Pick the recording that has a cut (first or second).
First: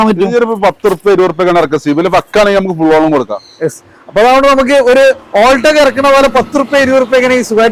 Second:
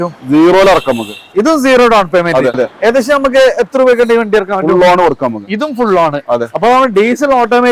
second